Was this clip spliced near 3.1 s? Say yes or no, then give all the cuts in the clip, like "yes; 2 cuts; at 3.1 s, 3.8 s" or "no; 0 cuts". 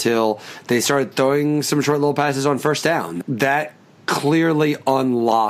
yes; 1 cut; at 3.1 s